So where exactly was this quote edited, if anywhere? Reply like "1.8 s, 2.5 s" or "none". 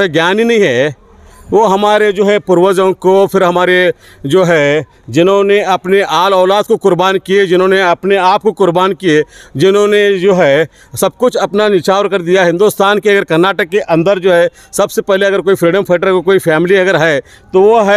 none